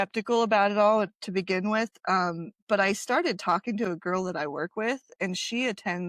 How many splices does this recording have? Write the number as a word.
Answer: zero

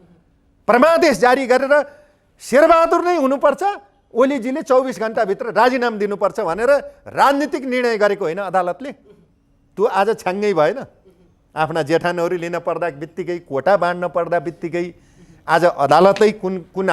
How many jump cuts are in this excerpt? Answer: zero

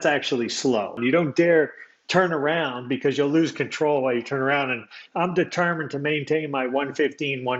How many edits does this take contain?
one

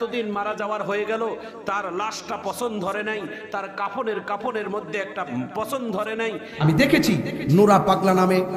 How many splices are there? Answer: one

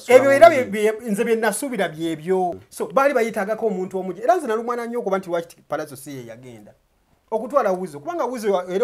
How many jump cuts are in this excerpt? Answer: one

